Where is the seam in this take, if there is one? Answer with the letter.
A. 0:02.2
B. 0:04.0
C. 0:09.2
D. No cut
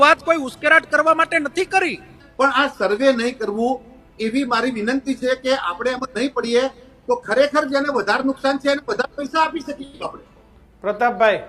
A